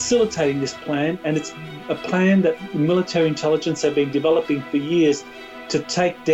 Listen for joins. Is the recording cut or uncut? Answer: uncut